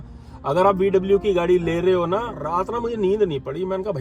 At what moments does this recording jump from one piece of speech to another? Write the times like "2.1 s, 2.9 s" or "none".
2.4 s